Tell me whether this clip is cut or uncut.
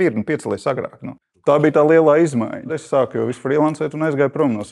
cut